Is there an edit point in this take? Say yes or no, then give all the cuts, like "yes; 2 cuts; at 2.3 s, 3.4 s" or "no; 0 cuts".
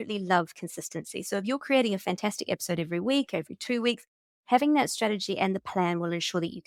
no; 0 cuts